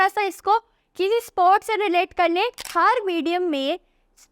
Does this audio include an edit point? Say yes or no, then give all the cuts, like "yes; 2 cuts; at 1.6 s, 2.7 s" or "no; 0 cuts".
yes; 1 cut; at 2.6 s